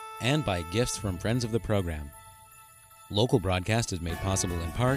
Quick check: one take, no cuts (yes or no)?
yes